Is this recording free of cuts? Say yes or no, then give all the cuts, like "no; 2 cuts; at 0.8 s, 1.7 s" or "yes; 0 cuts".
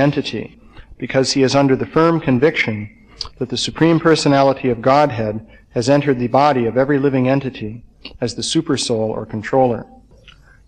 yes; 0 cuts